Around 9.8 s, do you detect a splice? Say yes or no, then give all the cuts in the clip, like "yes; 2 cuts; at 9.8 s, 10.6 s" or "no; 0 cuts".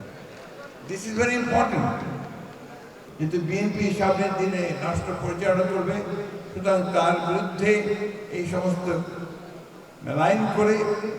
no; 1 cut; at 2.9 s